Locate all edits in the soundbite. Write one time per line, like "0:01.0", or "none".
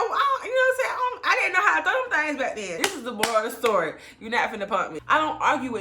0:02.7
0:04.9